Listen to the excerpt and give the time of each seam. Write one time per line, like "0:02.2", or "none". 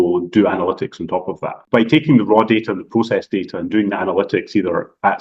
0:01.6

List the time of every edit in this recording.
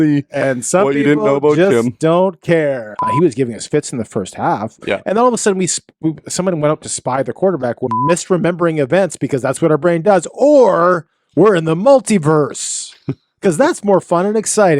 0:02.9
0:07.9

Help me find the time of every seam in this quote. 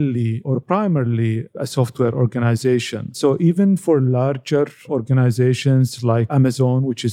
none

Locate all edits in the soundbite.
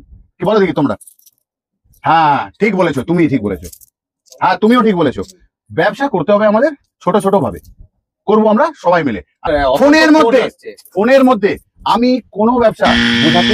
0:09.5

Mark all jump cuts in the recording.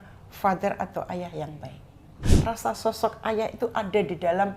0:02.2

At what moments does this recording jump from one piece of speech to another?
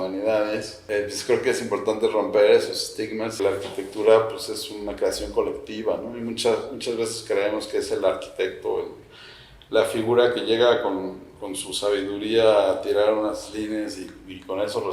0:00.8
0:03.4

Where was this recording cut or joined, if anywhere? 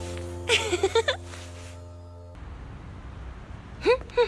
0:02.4

